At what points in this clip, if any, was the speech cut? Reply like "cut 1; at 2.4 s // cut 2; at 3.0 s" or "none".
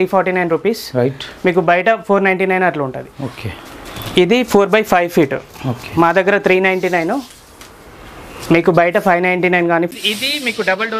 cut 1; at 9.9 s